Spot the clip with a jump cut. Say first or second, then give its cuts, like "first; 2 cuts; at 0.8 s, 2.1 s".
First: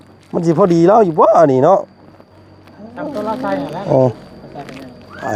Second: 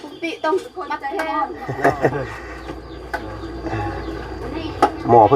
second; 1 cut; at 1.2 s